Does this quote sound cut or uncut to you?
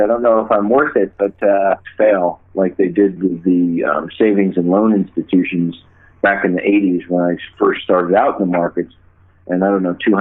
uncut